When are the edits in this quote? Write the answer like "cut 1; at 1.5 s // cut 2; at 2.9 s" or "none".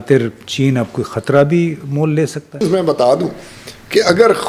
cut 1; at 2.6 s